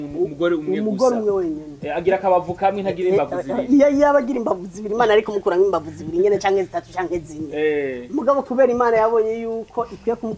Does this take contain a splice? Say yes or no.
no